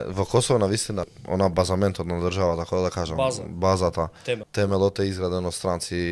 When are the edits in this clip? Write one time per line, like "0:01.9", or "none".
0:01.1
0:04.5